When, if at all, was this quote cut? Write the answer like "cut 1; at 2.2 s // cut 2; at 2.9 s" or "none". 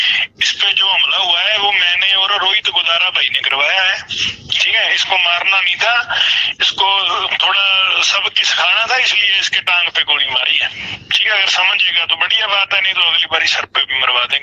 cut 1; at 1.9 s